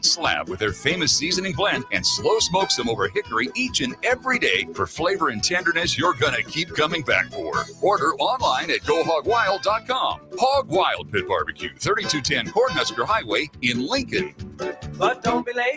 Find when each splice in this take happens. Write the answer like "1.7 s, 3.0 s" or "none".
none